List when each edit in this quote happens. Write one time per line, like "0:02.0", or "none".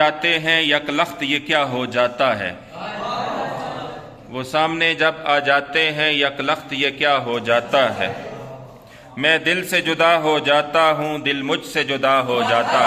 none